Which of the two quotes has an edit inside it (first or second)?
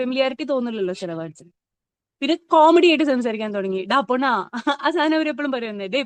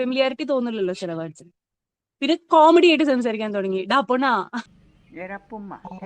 second